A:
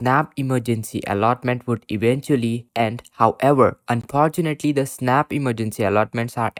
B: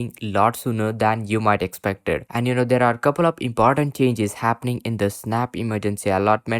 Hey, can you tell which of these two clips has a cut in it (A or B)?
B